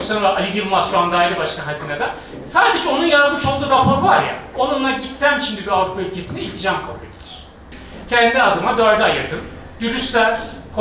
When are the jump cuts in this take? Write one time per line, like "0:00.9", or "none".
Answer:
none